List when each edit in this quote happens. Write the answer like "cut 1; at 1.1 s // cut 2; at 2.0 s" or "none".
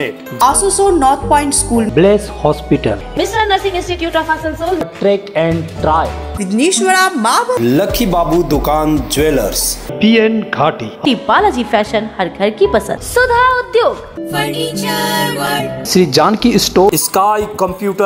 cut 1; at 7.6 s // cut 2; at 13.0 s // cut 3; at 16.9 s